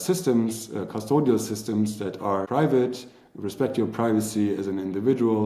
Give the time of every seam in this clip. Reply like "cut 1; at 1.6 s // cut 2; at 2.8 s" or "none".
cut 1; at 2.5 s